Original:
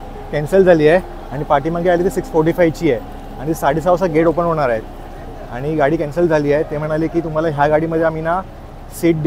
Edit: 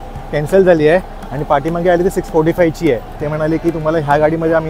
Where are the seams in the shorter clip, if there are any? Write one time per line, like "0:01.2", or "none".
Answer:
0:03.2